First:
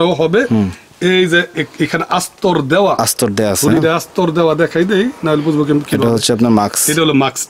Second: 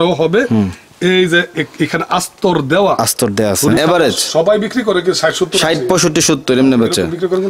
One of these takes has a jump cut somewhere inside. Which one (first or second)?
second